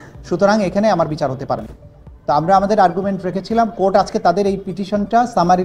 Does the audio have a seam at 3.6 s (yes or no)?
no